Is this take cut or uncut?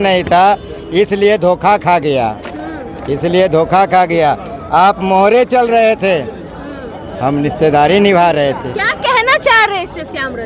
uncut